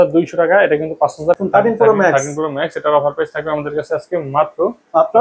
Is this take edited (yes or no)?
yes